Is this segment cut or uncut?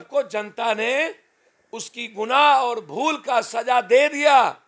uncut